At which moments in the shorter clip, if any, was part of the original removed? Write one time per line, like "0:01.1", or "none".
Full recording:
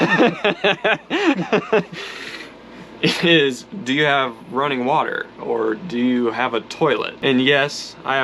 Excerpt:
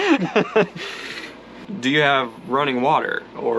0:01.7